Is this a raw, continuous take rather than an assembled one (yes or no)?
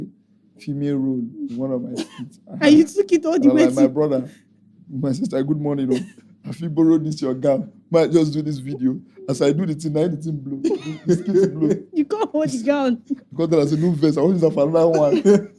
yes